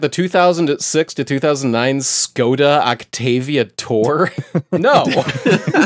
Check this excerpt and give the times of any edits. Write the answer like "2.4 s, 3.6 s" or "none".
none